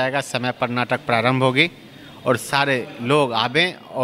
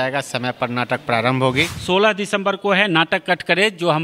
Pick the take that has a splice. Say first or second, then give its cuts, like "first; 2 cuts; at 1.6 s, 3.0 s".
second; 1 cut; at 1.7 s